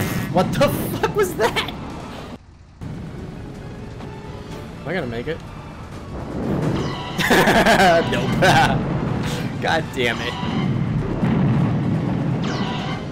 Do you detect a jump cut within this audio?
yes; 1 cut; at 2.8 s

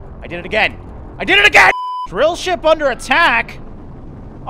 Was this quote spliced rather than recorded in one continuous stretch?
yes; 1 cut; at 1.9 s

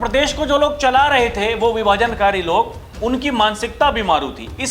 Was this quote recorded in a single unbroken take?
yes; 0 cuts

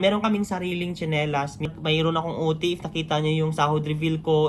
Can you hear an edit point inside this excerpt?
yes; 1 cut; at 1.7 s

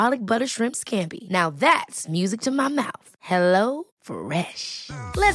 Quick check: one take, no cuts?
yes; 0 cuts

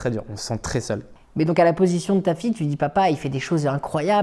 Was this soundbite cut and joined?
yes; 1 cut; at 1.1 s

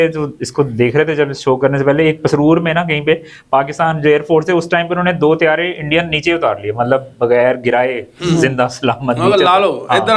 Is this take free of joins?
yes; 0 cuts

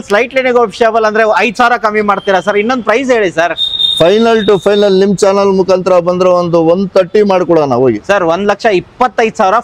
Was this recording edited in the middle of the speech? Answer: no; 0 cuts

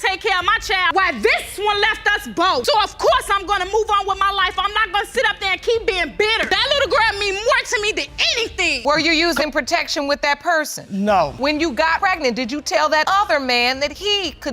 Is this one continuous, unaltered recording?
no; 1 cut; at 8.8 s

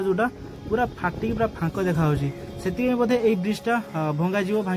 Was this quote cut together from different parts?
no; 0 cuts

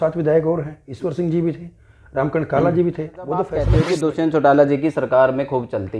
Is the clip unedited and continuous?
no; 1 cut; at 3.7 s

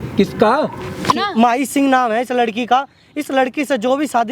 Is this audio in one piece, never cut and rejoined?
no; 1 cut; at 1.1 s

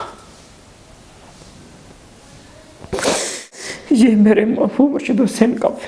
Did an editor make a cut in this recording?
yes; 1 cut; at 3.7 s

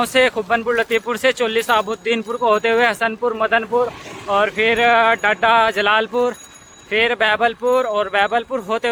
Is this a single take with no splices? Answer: yes; 0 cuts

